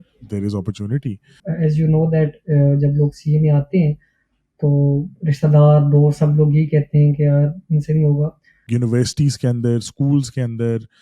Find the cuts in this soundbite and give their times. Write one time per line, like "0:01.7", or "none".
0:01.4
0:08.6